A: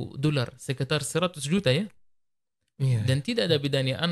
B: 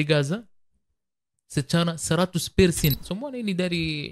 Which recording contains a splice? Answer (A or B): B